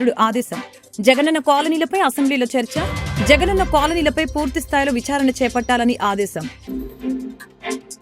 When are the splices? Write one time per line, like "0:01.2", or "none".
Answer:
0:06.5